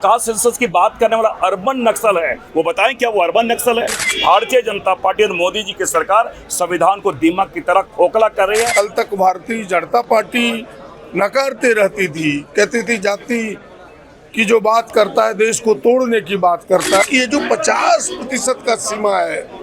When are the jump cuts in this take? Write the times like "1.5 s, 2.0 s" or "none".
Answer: 4.0 s, 8.7 s, 17.0 s